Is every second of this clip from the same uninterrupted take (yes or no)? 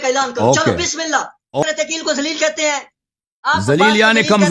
no